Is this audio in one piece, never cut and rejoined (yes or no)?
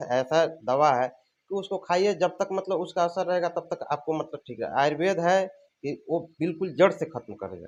yes